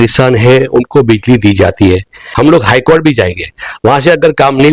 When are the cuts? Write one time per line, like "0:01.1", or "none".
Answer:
0:02.2